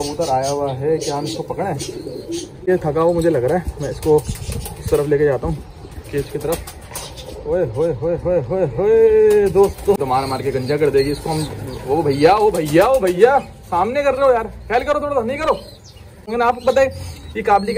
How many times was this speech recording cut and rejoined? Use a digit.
3